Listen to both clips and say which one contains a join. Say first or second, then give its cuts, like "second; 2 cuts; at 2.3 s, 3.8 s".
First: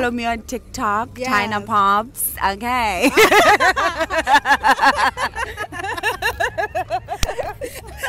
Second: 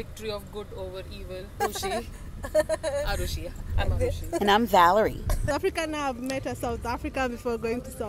second; 2 cuts; at 1.6 s, 5.5 s